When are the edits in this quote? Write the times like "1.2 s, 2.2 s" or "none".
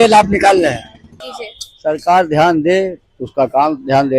1.3 s